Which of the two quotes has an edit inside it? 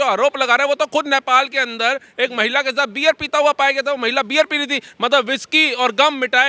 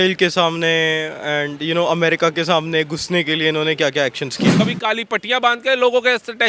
second; 1 cut; at 4.6 s

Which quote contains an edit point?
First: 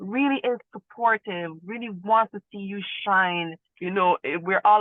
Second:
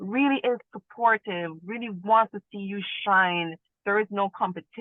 first; 1 cut; at 3.6 s

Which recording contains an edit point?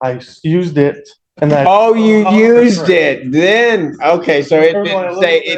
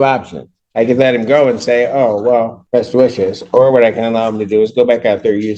second; 1 cut; at 2.6 s

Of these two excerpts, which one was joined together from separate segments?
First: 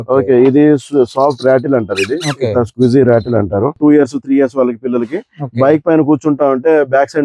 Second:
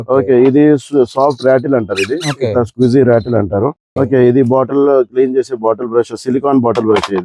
first; 1 cut; at 3.8 s

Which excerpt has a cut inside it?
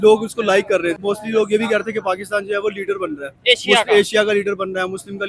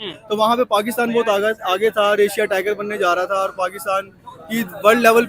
first; 1 cut; at 1.0 s

